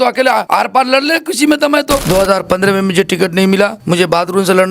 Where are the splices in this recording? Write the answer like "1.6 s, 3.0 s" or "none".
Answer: 2.0 s, 3.8 s